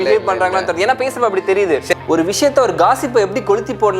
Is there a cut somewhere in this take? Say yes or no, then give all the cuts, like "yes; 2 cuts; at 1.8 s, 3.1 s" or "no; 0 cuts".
yes; 1 cut; at 1.9 s